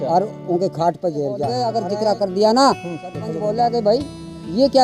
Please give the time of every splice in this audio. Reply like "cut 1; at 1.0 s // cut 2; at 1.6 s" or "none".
cut 1; at 1.6 s // cut 2; at 3.3 s

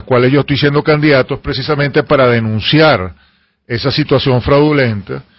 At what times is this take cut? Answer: cut 1; at 3.0 s

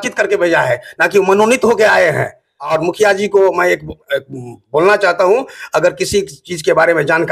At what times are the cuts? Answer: cut 1; at 2.7 s

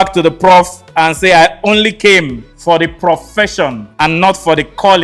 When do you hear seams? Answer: cut 1; at 2.4 s // cut 2; at 3.8 s

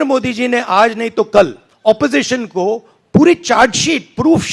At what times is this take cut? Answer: cut 1; at 1.6 s

